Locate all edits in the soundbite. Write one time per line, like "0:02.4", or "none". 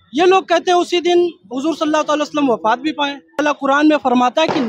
0:03.4